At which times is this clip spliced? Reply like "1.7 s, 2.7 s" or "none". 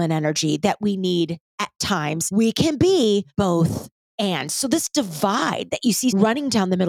2.2 s, 3.3 s, 6.1 s